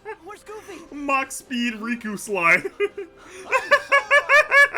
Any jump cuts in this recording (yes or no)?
no